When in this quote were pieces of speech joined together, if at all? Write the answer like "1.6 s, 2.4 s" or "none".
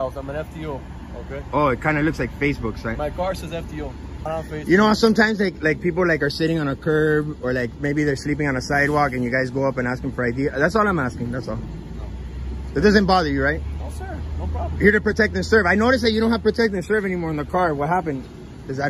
4.3 s